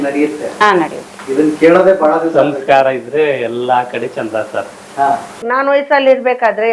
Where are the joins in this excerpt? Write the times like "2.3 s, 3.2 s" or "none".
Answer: 5.4 s